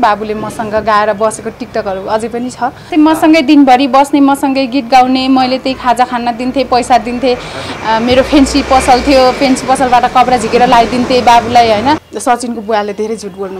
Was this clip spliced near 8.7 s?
no; 2 cuts; at 2.9 s, 12.1 s

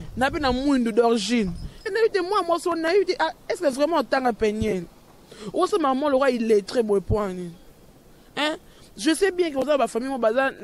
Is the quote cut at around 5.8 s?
no; 1 cut; at 1.9 s

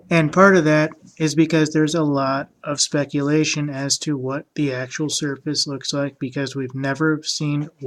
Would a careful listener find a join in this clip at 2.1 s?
no; 1 cut; at 4.7 s

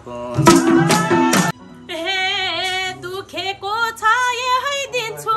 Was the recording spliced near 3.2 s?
no; 1 cut; at 1.6 s

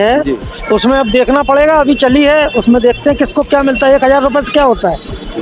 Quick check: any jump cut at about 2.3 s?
no; 0 cuts

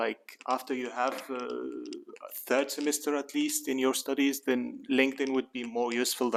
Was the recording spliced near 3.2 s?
no; 0 cuts

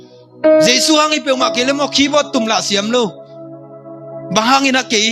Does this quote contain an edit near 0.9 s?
no; 0 cuts

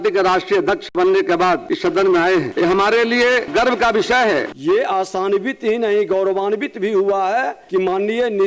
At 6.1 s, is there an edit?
no; 5 cuts; at 1.7 s, 2.5 s, 3.5 s, 4.5 s, 7.6 s

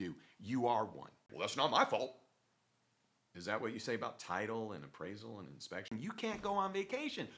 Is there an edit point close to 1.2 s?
yes; 2 cuts; at 1.2 s, 5.9 s

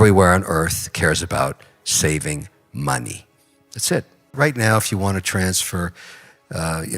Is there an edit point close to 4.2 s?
yes; 1 cut; at 4.2 s

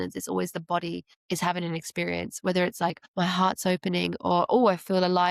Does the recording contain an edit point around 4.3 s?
no; 2 cuts; at 1.1 s, 3.0 s

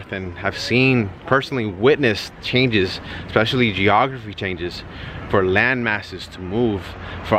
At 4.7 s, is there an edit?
no; 0 cuts

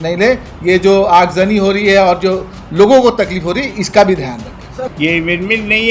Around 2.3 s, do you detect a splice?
no; 1 cut; at 4.9 s

